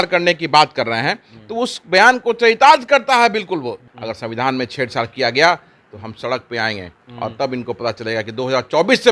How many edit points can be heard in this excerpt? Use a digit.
1